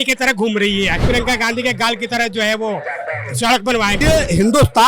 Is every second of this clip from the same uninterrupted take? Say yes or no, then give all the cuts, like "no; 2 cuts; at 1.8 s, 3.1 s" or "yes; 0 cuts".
no; 2 cuts; at 1.0 s, 4.0 s